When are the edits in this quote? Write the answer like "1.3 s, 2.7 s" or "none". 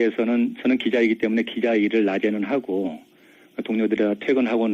2.0 s